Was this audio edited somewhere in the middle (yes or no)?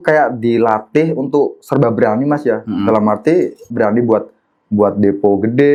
no